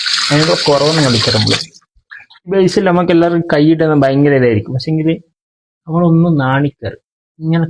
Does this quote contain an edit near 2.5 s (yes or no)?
yes